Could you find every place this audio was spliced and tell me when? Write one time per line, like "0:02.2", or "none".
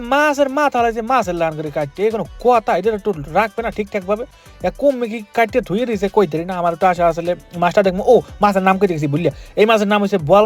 none